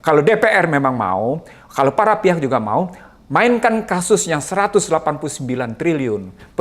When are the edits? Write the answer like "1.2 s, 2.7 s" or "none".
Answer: none